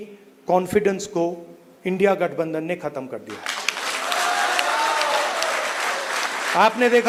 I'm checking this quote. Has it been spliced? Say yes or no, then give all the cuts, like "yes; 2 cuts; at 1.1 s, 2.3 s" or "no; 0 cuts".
no; 0 cuts